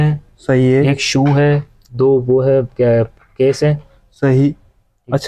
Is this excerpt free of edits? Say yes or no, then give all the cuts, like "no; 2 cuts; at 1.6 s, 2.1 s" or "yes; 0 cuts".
yes; 0 cuts